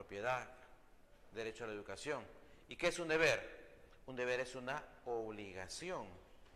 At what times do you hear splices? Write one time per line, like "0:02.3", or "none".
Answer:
0:04.7

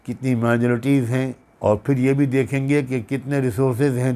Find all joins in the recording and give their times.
0:01.4

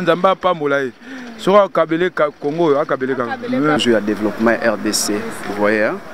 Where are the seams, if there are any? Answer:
0:03.8

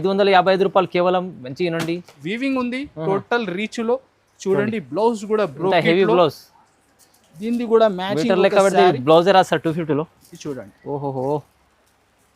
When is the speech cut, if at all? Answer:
0:02.2

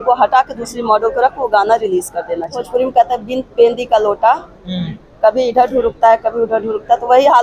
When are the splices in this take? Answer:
0:02.6

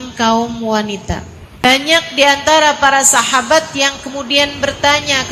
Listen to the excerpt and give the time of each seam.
0:01.6

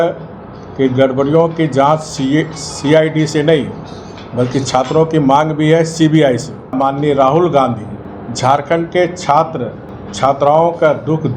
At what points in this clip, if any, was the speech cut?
0:06.8

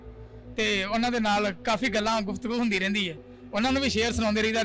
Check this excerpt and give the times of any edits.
none

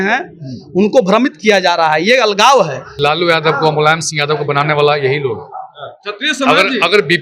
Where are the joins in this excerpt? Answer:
0:02.9

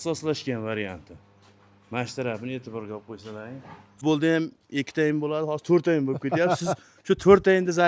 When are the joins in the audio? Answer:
0:03.9

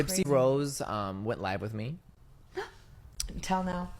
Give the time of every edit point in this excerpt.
none

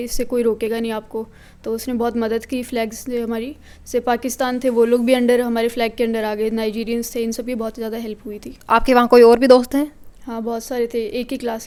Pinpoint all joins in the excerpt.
none

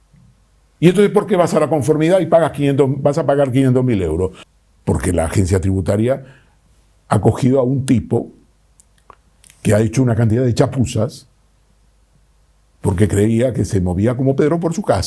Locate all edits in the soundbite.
0:04.4

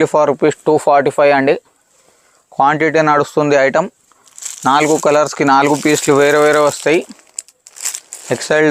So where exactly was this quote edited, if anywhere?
none

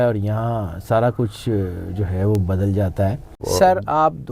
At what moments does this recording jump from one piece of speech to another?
0:03.3

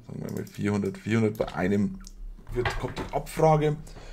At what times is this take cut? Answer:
0:02.4

